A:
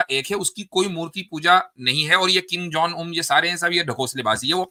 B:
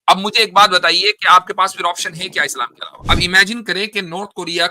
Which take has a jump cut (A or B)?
B